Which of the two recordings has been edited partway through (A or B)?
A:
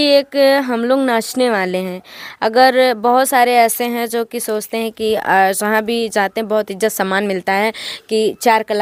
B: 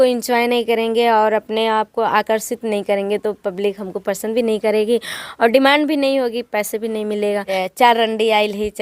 B